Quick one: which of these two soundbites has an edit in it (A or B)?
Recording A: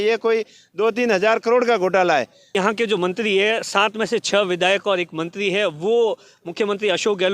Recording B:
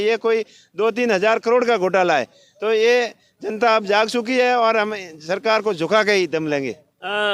A